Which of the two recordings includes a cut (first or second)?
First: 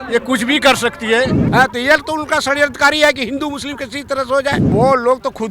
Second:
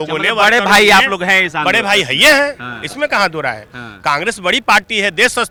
first